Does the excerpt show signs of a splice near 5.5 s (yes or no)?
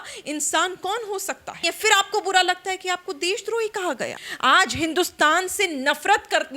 no